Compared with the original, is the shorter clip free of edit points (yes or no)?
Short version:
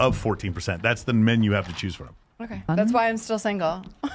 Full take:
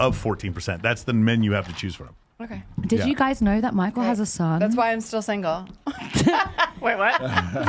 no